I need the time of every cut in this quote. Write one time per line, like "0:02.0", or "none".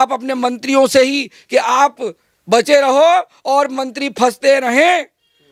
none